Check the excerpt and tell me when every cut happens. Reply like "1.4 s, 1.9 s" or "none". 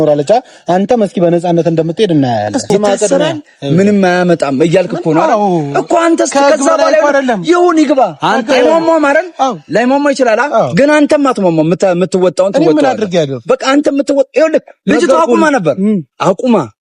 2.7 s